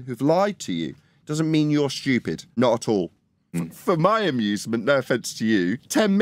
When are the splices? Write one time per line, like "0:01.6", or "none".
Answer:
0:02.5
0:03.6